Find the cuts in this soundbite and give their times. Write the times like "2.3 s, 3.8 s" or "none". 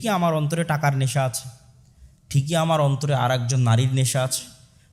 none